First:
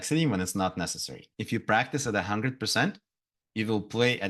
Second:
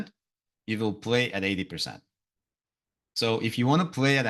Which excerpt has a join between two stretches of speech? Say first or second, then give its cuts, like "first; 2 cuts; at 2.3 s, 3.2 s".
first; 1 cut; at 1.3 s